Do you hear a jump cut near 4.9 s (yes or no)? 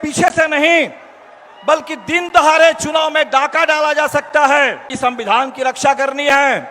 yes